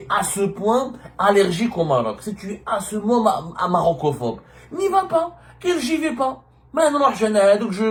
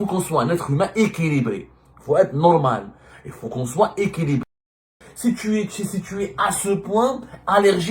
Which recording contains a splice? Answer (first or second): second